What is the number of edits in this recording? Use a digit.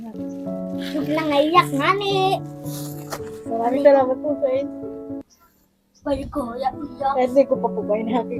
0